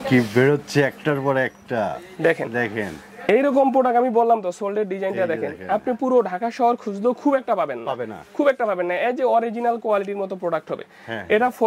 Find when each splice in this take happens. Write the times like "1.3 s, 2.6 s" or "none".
none

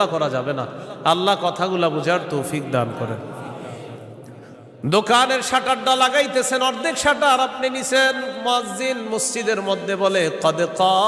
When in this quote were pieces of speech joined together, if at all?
4.7 s

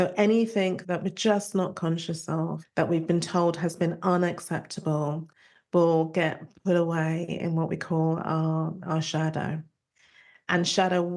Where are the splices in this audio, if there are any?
0.8 s, 2.6 s

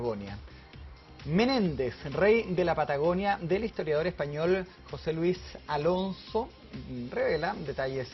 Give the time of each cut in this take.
none

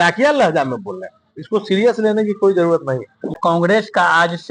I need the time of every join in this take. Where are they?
3.4 s

